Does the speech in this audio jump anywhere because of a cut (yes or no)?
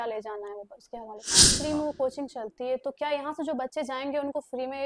yes